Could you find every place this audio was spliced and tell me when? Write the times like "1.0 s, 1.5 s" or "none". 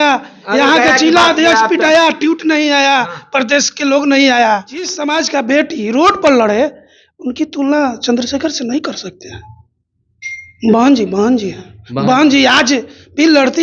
5.0 s